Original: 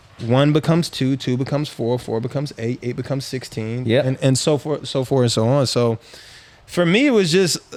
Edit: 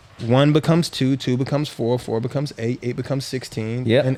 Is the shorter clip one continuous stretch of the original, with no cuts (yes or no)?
yes